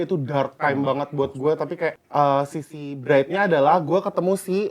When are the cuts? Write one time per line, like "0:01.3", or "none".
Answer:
0:02.0